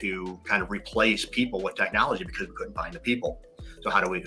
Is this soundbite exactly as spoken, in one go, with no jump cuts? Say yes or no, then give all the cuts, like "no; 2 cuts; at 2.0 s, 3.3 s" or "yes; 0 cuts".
yes; 0 cuts